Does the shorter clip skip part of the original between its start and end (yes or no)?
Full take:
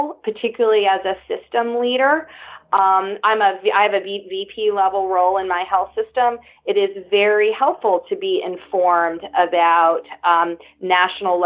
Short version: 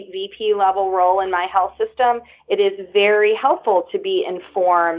no